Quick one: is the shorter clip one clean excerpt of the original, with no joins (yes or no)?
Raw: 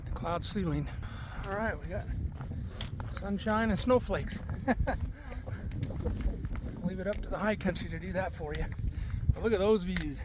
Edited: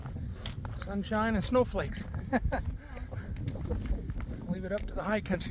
yes